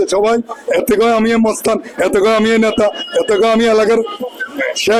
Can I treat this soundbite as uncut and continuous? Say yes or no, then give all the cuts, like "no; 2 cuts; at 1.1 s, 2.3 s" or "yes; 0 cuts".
yes; 0 cuts